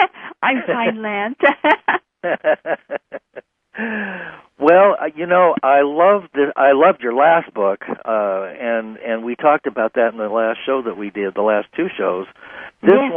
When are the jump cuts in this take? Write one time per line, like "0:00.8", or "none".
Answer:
0:03.5